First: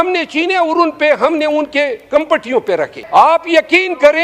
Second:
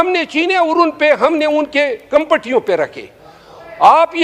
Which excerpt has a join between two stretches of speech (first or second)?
first